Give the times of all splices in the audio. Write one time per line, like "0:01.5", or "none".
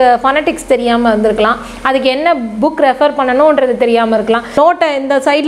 0:04.5

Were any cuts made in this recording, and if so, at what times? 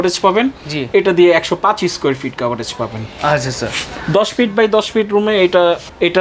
none

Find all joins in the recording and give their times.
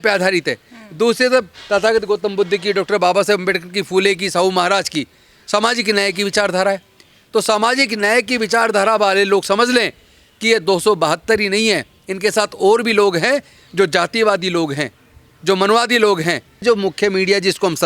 0:16.6

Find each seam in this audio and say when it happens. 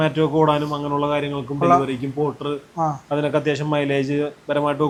none

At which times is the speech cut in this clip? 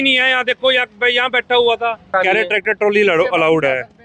0:02.1

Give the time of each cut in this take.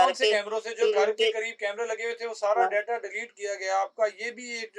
none

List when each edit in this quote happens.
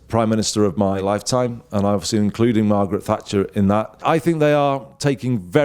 0:01.0
0:04.0

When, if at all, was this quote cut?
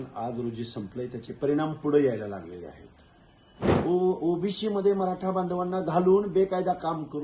0:03.6

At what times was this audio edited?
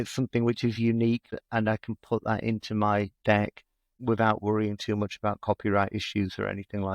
0:01.3
0:03.3

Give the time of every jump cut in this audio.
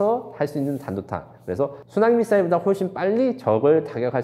none

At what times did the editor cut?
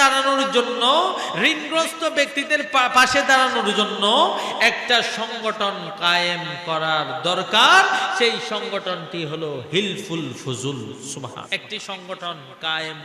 0:11.5

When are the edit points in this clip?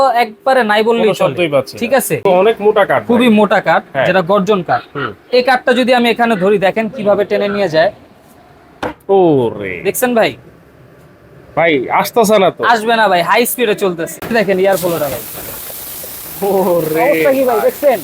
0:02.1
0:14.1

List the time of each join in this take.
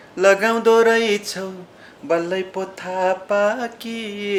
none

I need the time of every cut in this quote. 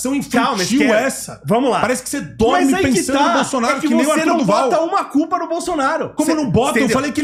none

